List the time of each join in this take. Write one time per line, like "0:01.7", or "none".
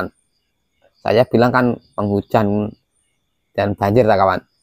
none